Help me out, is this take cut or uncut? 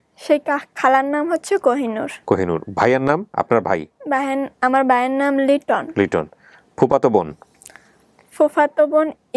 uncut